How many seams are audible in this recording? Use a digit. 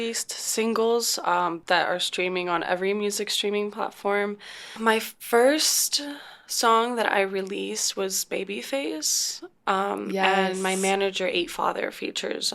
2